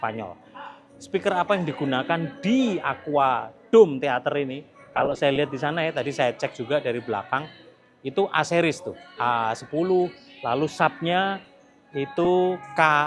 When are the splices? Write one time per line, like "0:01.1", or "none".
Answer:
none